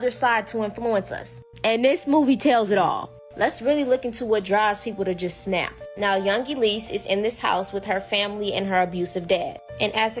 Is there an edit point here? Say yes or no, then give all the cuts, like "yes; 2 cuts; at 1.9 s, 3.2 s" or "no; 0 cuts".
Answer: no; 0 cuts